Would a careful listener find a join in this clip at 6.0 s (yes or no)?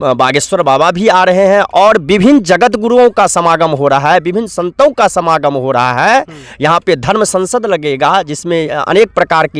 no